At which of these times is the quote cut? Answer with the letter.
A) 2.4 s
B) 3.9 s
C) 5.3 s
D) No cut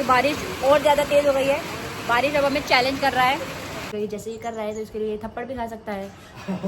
B